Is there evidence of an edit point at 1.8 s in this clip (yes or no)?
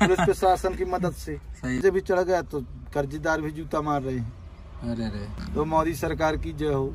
yes